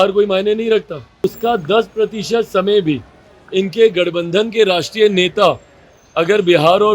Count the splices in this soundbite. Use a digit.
1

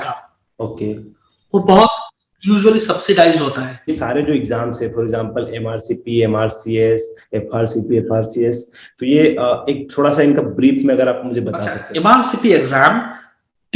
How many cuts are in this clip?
2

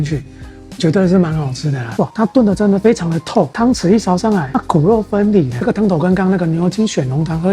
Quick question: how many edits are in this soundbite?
2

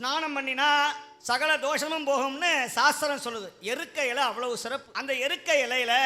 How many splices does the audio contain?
2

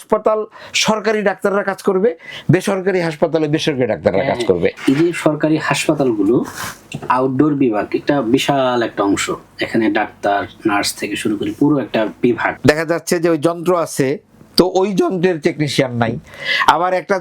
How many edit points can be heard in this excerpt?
2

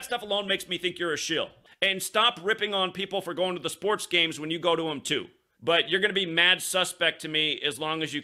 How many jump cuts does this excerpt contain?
2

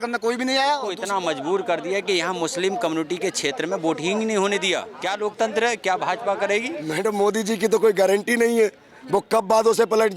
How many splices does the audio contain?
3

